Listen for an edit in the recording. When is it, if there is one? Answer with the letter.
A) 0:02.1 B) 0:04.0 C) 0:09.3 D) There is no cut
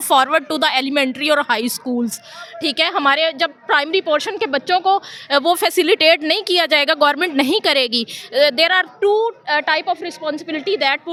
D